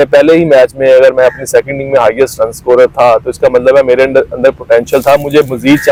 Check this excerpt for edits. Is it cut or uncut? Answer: uncut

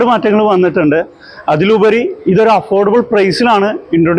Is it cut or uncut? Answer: uncut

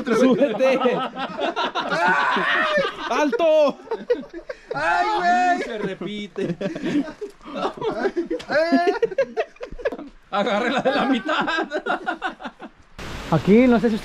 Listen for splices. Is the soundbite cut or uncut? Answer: cut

